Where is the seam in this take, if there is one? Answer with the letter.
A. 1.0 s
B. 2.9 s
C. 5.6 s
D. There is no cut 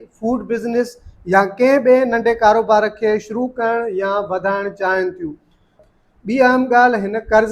C